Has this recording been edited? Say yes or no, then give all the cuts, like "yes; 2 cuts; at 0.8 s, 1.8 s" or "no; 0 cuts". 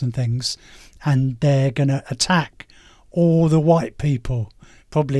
no; 0 cuts